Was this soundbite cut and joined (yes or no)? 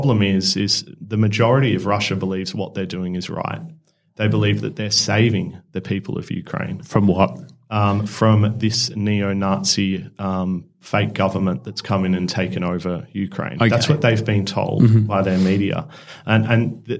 no